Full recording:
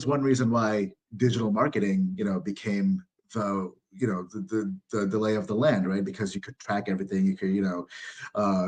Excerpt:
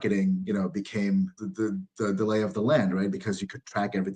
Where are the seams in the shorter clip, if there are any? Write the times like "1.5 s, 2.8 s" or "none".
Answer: 1.4 s